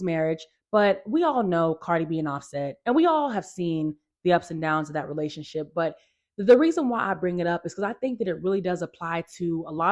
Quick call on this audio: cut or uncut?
uncut